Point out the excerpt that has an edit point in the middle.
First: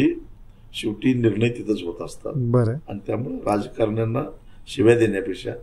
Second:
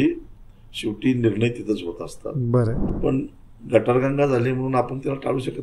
second; 1 cut; at 2.9 s

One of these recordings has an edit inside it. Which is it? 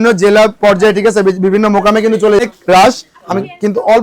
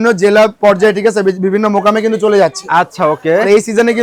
first; 1 cut; at 2.4 s

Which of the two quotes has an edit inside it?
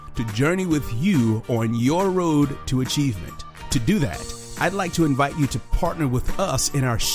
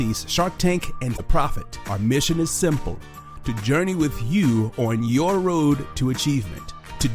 second; 1 cut; at 1.2 s

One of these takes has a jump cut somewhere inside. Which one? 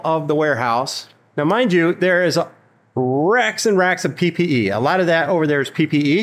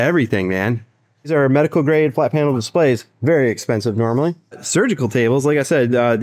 second; 2 cuts; at 1.3 s, 4.6 s

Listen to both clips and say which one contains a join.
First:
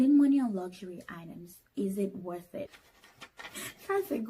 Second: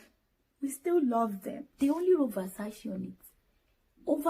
second; 1 cut; at 1.6 s

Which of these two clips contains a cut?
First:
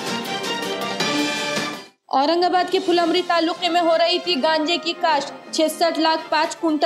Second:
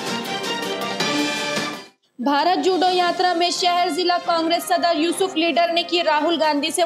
first; 1 cut; at 1.9 s

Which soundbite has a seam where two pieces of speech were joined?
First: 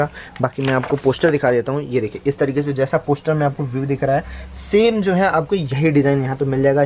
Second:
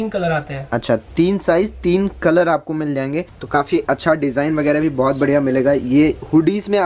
second; 1 cut; at 3.4 s

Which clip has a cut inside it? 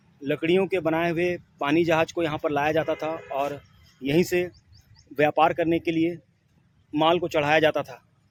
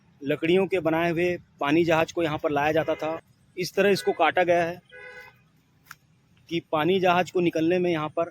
second; 1 cut; at 3.2 s

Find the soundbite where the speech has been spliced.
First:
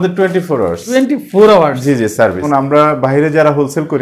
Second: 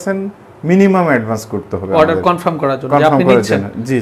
first; 2 cuts; at 0.8 s, 2.4 s

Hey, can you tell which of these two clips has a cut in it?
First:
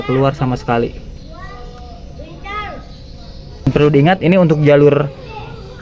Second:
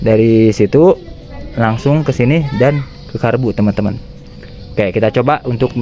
first; 1 cut; at 3.7 s

